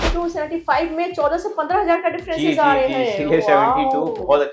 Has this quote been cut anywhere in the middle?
no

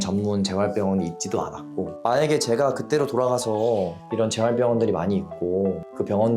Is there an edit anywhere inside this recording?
yes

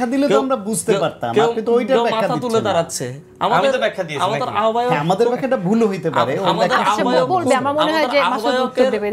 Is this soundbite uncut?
yes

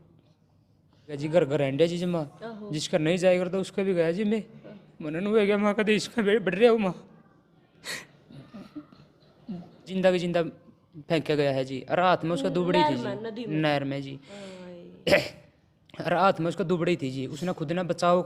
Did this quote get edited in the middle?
yes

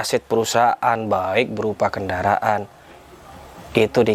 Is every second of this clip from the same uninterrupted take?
yes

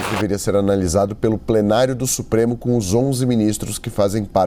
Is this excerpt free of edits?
yes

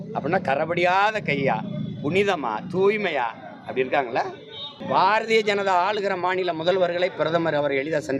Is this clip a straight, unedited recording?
no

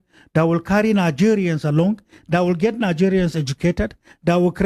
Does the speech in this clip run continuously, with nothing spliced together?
yes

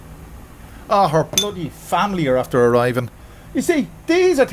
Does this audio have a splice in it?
no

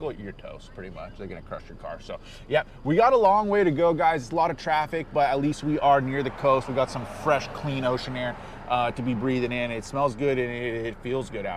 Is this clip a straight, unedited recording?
yes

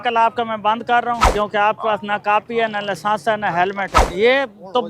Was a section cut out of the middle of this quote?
yes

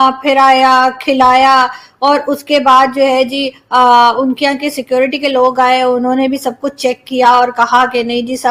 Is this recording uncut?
yes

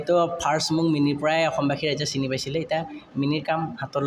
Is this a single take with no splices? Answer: yes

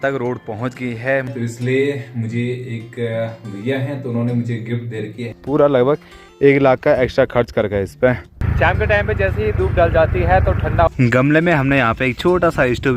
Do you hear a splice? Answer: yes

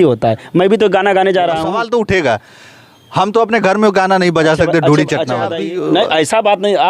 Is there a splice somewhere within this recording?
yes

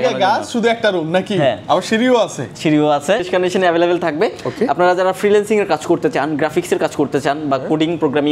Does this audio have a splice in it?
yes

